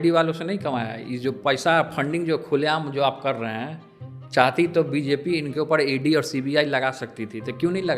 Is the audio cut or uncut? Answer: uncut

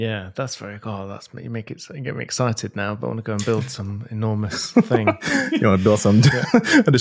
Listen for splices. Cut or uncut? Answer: uncut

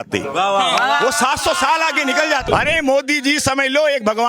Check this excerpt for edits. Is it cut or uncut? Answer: cut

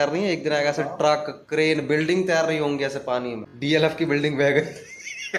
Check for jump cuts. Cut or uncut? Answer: cut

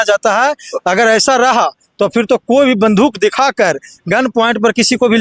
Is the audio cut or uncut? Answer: uncut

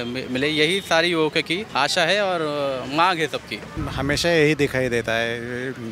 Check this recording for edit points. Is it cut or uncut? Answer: cut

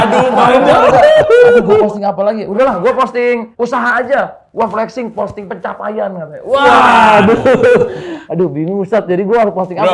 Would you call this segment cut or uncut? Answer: cut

